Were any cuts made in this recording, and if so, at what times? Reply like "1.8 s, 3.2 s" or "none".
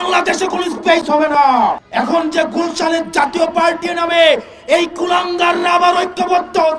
1.8 s